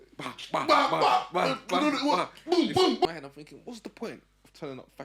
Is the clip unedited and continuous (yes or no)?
no